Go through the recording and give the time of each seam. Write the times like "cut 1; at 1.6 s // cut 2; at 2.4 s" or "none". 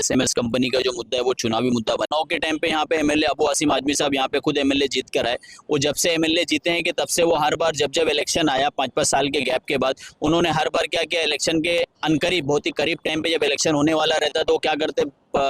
cut 1; at 2.1 s